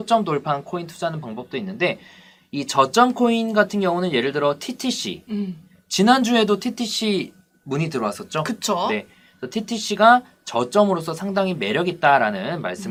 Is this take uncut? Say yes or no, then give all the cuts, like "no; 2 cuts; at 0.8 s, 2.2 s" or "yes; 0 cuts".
yes; 0 cuts